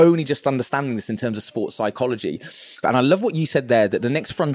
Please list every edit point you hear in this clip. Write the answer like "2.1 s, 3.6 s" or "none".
2.8 s